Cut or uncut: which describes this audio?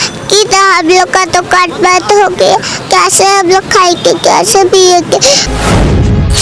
cut